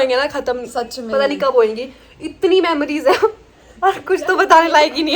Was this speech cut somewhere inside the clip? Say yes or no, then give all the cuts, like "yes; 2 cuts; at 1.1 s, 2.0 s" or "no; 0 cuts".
no; 0 cuts